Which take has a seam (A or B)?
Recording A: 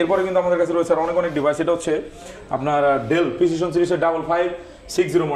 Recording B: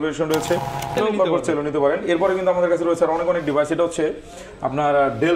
B